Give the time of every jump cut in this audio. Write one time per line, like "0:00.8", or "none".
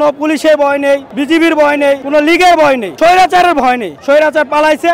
0:01.1
0:02.0
0:02.9
0:03.9